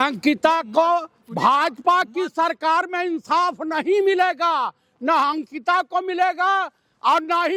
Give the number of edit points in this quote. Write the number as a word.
zero